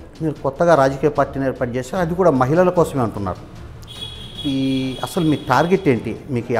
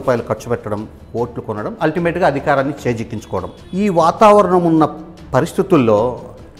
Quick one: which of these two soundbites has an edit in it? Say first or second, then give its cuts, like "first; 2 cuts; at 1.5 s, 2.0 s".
second; 1 cut; at 3.6 s